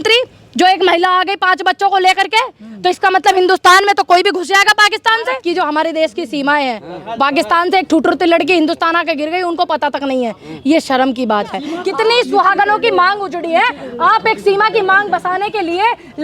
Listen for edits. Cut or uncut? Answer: cut